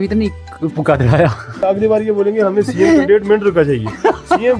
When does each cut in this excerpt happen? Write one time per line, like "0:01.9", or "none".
0:01.5